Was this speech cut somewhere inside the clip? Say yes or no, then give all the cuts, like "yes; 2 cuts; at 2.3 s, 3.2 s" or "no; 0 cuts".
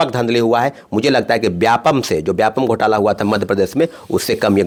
no; 0 cuts